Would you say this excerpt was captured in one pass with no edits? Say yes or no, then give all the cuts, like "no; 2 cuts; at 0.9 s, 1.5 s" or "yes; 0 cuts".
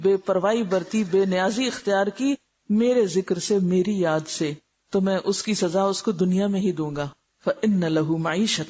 no; 1 cut; at 7.2 s